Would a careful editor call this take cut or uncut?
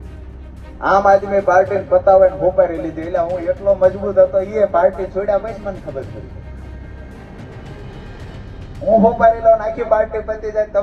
uncut